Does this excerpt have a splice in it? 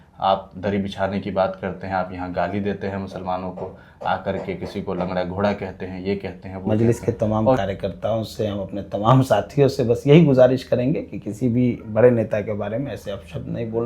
yes; 1 cut; at 6.7 s

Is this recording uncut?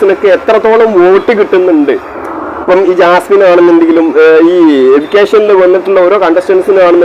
yes; 0 cuts

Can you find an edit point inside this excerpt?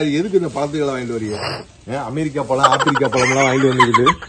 no; 0 cuts

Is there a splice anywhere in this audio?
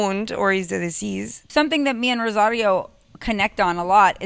yes; 1 cut; at 1.4 s

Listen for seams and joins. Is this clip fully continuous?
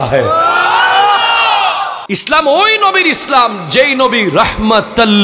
no; 1 cut; at 2.0 s

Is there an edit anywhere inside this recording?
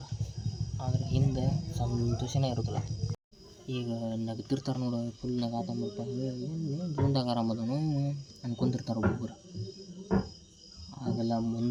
no; 0 cuts

